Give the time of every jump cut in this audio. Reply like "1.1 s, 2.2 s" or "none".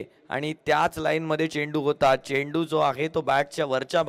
none